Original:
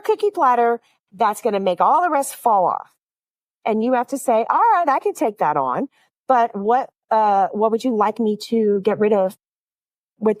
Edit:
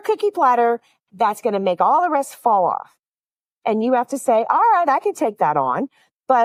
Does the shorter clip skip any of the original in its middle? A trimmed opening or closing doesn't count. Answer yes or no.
no